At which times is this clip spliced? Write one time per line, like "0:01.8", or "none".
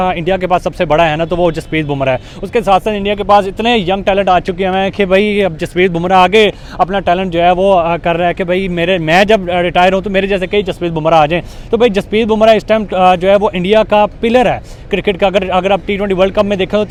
none